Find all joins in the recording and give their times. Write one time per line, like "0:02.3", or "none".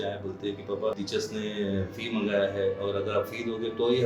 0:00.9